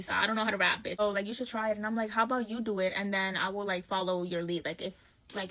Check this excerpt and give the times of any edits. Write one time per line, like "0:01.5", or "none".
0:01.0